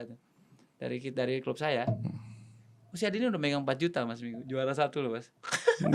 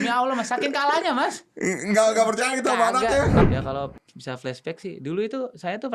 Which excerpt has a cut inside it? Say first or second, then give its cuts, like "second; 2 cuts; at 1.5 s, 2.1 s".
second; 1 cut; at 3.4 s